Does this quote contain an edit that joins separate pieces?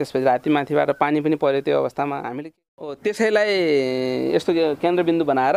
yes; 1 cut; at 2.4 s

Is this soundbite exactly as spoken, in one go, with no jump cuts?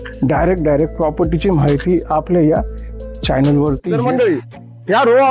no; 1 cut; at 3.9 s

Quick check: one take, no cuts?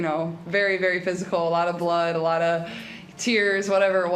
yes; 0 cuts

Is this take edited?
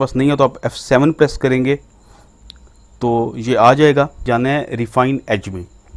yes; 1 cut; at 4.2 s

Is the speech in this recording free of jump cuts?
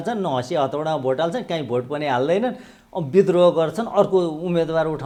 yes; 0 cuts

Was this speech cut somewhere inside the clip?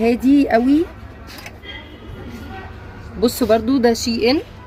no; 0 cuts

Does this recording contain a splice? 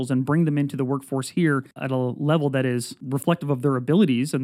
yes; 2 cuts; at 1.7 s, 3.0 s

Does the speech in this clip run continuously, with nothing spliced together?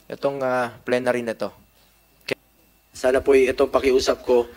no; 1 cut; at 2.3 s

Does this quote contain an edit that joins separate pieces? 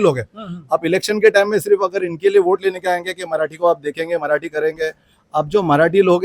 no; 0 cuts

